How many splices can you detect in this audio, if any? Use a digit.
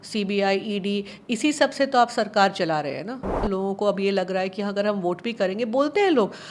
1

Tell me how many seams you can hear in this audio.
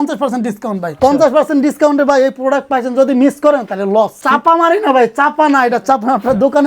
2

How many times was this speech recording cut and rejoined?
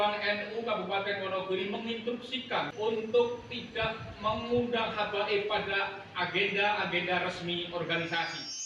1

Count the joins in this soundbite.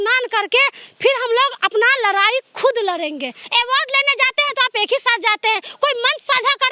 1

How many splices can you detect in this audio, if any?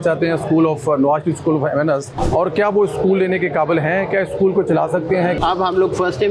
2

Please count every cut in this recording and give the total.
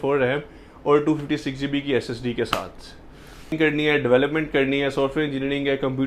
1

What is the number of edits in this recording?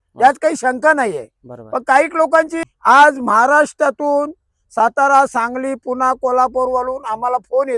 1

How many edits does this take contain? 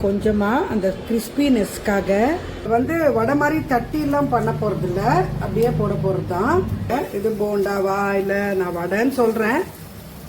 2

